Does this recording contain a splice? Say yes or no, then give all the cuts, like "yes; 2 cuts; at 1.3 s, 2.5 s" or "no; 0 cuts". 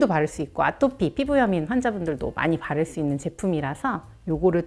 no; 0 cuts